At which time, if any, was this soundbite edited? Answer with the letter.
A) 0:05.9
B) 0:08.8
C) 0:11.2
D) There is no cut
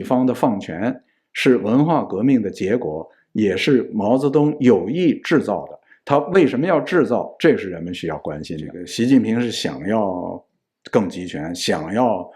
B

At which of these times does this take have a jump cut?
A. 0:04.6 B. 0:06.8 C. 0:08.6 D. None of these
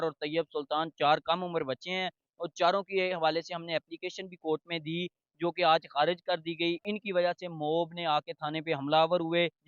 B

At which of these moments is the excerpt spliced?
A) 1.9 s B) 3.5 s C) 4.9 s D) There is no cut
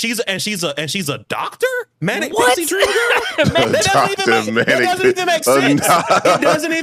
B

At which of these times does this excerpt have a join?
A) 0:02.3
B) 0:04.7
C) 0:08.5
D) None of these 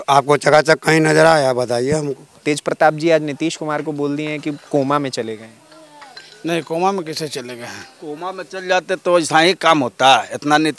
A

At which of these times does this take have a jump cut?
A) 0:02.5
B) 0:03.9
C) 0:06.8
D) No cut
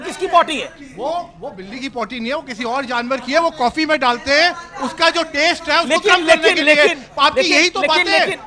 D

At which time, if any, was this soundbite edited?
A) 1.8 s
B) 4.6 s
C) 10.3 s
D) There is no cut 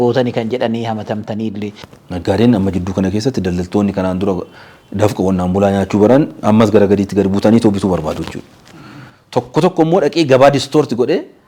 A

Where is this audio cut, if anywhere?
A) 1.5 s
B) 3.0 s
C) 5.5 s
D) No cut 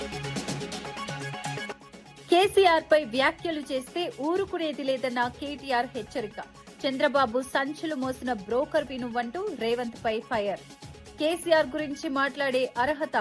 A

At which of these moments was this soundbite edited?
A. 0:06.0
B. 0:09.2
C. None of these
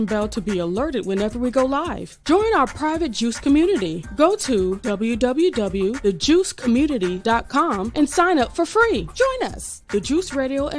B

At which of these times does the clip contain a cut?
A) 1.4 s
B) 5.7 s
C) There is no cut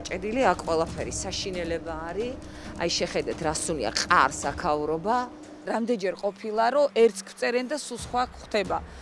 B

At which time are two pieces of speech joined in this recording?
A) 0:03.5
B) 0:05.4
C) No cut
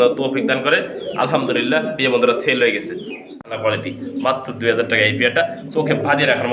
A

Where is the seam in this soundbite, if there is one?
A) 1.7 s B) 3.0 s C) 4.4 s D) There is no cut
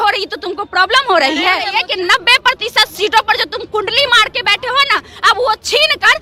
A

